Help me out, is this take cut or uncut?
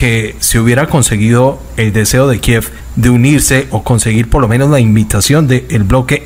uncut